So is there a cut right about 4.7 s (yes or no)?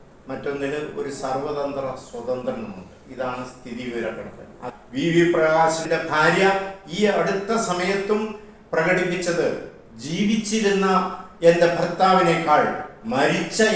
yes